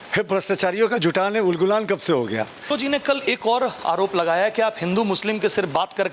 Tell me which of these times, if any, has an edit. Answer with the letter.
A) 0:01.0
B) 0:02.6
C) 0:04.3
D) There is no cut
B